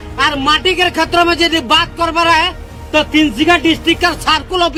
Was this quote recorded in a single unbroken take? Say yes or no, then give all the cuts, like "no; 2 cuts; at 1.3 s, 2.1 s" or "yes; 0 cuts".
yes; 0 cuts